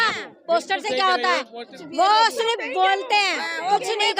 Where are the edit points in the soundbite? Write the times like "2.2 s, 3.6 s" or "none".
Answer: 1.6 s